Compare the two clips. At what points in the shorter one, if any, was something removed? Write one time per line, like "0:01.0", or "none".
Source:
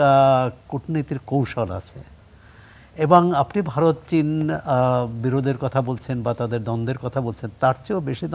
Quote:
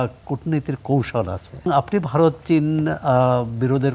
0:01.7